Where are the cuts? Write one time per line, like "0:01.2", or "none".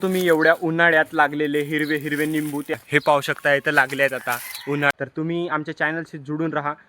0:02.7
0:04.9